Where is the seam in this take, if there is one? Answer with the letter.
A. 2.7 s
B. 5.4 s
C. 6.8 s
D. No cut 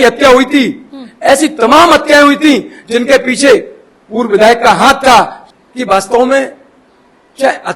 B